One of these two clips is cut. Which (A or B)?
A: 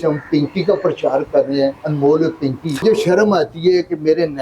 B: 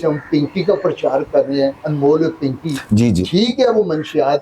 A